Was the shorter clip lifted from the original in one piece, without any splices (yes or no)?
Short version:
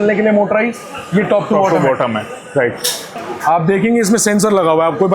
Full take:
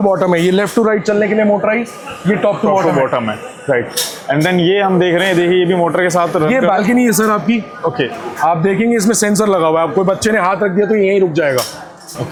no